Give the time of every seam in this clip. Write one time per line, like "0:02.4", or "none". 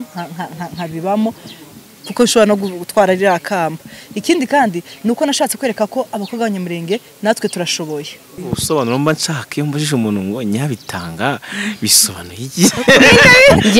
0:08.4